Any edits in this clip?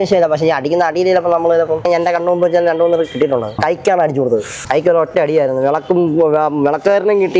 yes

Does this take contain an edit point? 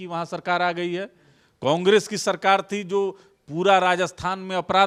no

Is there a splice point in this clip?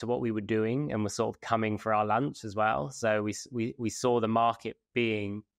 no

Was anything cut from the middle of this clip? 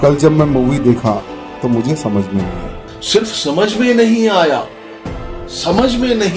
yes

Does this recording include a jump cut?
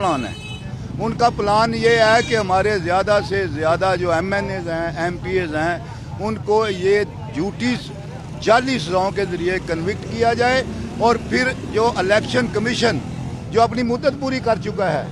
no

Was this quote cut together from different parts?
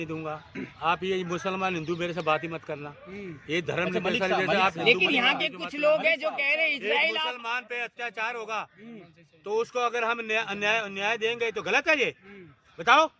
no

